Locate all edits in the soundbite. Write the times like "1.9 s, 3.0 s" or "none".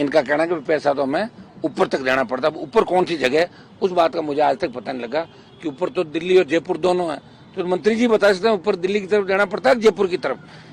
none